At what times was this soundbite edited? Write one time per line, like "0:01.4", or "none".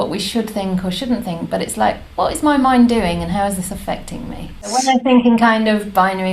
0:04.7